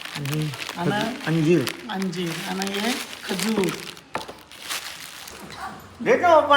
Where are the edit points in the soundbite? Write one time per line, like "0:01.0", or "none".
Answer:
0:05.3